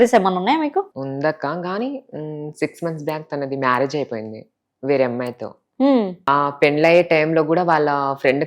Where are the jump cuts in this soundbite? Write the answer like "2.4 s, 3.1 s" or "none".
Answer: 0.9 s, 6.3 s